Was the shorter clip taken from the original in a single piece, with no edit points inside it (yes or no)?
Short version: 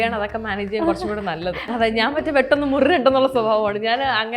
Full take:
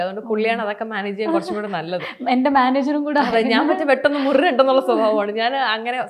no